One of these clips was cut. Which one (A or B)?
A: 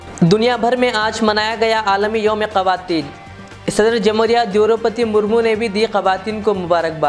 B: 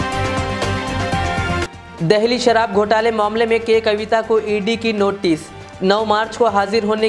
B